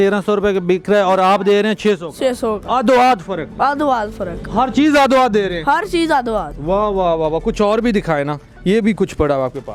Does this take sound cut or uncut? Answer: uncut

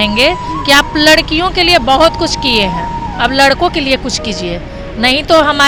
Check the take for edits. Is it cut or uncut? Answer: uncut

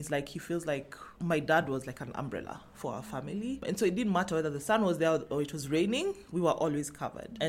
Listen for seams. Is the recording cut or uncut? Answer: cut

